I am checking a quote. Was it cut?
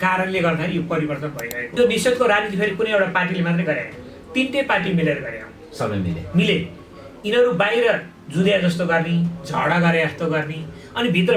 yes; 1 cut; at 1.7 s

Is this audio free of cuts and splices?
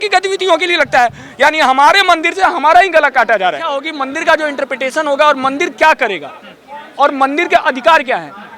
no; 1 cut; at 4.0 s

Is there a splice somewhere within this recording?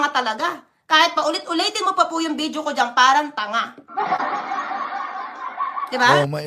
no; 0 cuts

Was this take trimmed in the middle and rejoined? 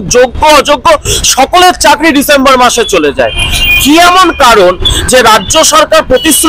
no; 0 cuts

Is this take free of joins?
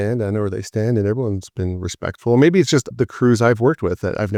yes; 0 cuts

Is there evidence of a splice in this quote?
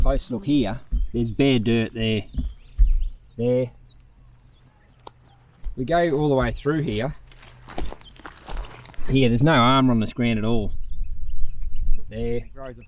no; 0 cuts

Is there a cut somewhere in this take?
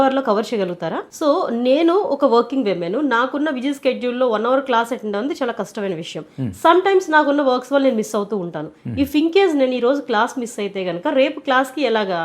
yes; 1 cut; at 1.1 s

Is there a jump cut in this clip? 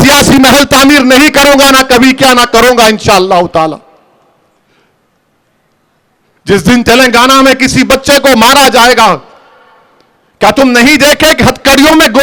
no; 0 cuts

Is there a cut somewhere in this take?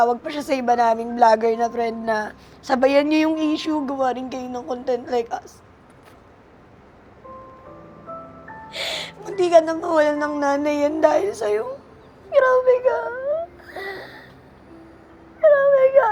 no; 0 cuts

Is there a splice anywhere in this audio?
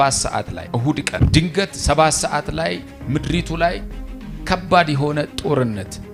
no; 0 cuts

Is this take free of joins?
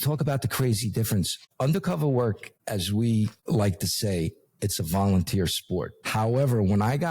no; 4 cuts; at 1.4 s, 2.5 s, 3.4 s, 6.0 s

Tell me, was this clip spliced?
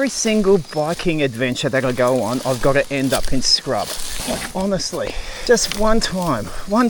yes; 2 cuts; at 4.1 s, 5.3 s

